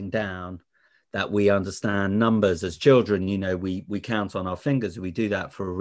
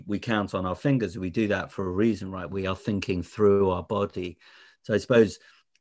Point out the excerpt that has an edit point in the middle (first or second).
first